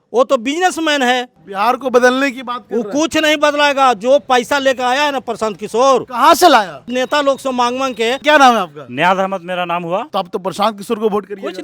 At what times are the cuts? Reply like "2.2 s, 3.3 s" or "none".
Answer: 1.4 s, 6.9 s, 8.2 s, 10.1 s